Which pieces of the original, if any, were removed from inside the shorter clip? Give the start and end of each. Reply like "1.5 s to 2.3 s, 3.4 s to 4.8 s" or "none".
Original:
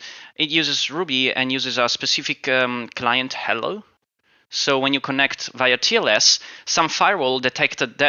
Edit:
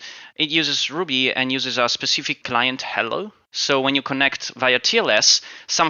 2.4 s to 2.9 s, 4.0 s to 4.4 s